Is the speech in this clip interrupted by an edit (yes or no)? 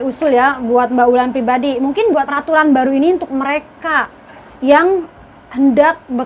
yes